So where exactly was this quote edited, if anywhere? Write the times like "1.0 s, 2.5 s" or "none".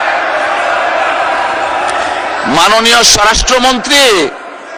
none